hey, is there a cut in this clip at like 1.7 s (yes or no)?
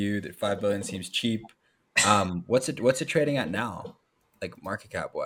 no